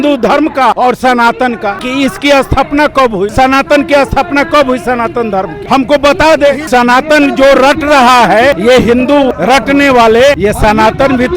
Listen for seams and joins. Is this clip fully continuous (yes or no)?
no